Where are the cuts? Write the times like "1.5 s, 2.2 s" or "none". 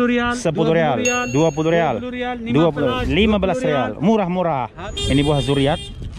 4.8 s